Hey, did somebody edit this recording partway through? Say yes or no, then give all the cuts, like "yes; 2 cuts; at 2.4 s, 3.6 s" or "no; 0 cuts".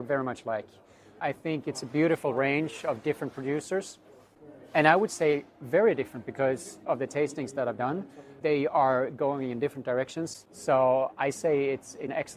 yes; 1 cut; at 10.4 s